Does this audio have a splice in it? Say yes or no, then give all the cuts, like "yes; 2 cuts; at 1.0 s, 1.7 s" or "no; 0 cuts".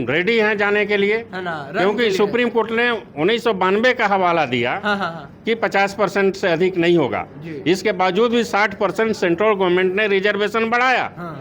no; 0 cuts